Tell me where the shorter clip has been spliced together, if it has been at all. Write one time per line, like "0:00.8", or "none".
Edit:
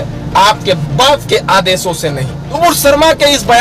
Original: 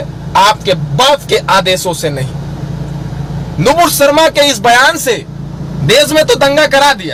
0:02.6